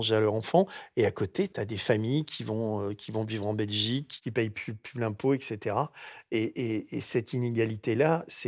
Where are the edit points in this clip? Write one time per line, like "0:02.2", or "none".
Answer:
0:01.5
0:04.1